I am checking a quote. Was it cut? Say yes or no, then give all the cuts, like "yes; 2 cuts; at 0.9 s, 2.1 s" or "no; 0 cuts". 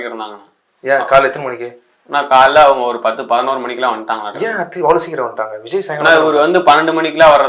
no; 0 cuts